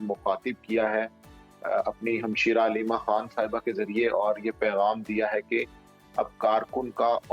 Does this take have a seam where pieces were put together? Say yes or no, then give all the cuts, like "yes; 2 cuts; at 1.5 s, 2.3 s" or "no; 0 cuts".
no; 0 cuts